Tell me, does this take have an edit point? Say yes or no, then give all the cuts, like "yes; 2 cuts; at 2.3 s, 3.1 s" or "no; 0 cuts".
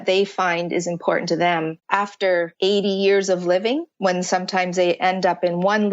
yes; 2 cuts; at 2.2 s, 3.9 s